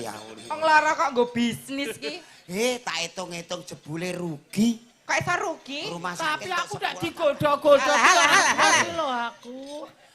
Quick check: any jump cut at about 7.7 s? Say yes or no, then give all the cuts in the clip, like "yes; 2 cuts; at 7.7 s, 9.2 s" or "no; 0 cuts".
no; 1 cut; at 6.2 s